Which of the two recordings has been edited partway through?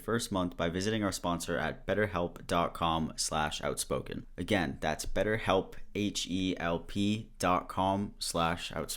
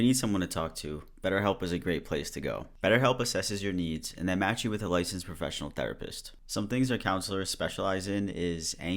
first; 1 cut; at 4.2 s

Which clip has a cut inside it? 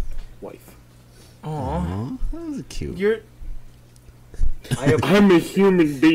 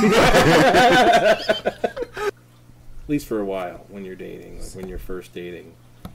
second; 1 cut; at 2.3 s

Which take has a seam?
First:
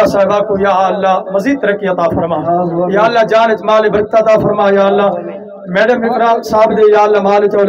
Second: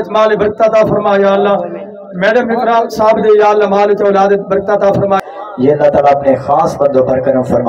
second; 1 cut; at 5.2 s

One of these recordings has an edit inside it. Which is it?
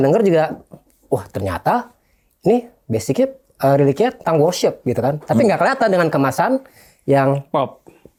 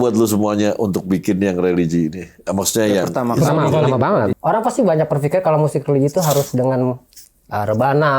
second; 1 cut; at 4.3 s

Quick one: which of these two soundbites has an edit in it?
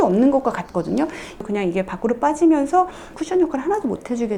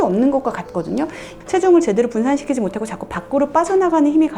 first; 1 cut; at 1.3 s

